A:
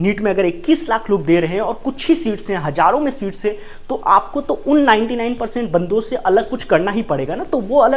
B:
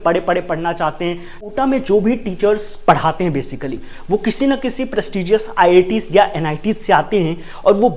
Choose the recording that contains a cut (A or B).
B